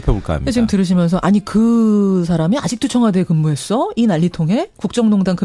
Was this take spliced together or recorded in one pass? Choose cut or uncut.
uncut